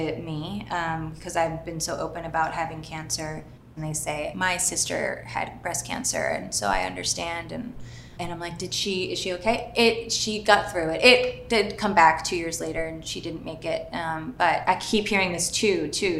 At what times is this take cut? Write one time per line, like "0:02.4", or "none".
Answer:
none